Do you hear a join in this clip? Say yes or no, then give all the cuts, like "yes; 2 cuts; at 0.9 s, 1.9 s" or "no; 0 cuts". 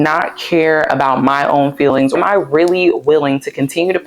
yes; 1 cut; at 2.1 s